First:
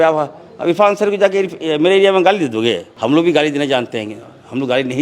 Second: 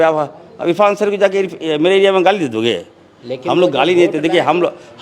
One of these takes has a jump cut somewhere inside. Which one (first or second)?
first